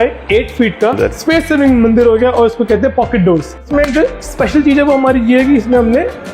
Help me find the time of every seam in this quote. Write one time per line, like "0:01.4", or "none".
0:01.0
0:03.6